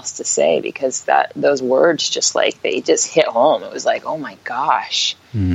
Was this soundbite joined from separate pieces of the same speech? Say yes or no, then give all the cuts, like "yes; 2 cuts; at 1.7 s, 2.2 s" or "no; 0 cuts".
no; 0 cuts